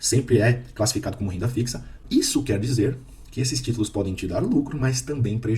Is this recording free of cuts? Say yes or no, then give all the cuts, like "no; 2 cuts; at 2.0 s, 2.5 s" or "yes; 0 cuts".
no; 1 cut; at 2.0 s